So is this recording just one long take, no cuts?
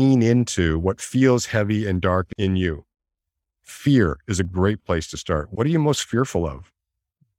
no; 1 cut; at 2.3 s

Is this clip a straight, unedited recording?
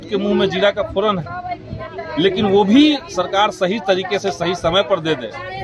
yes; 0 cuts

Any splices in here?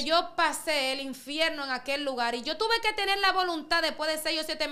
no; 0 cuts

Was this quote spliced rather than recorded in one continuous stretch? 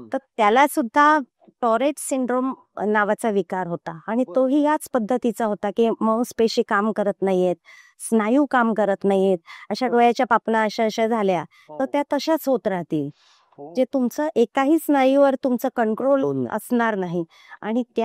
no; 0 cuts

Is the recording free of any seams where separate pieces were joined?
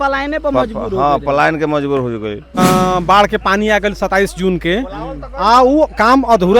no; 1 cut; at 2.6 s

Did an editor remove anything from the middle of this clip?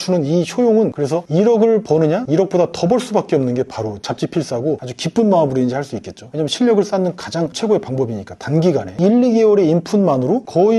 yes; 2 cuts; at 0.9 s, 4.8 s

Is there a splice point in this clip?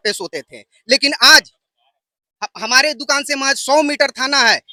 no; 0 cuts

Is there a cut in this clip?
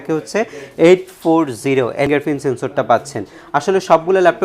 yes; 1 cut; at 2.1 s

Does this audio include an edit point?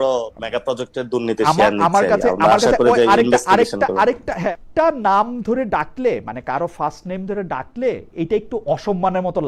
yes; 1 cut; at 4.4 s

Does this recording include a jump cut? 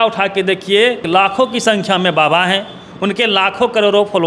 no; 0 cuts

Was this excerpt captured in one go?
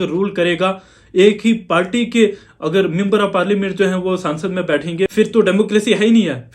no; 1 cut; at 5.1 s

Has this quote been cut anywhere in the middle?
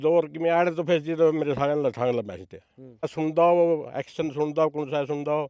yes; 1 cut; at 3.1 s

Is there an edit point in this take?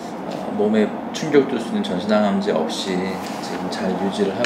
no; 0 cuts

